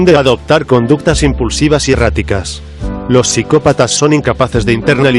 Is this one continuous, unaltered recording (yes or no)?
yes